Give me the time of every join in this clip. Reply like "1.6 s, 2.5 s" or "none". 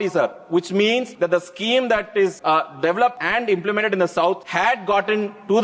1.1 s, 2.4 s, 3.2 s, 4.4 s